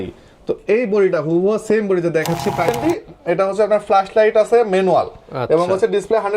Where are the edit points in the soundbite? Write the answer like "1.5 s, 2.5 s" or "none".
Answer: 2.7 s